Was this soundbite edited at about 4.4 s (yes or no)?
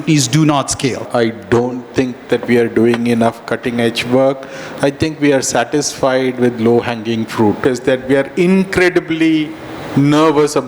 no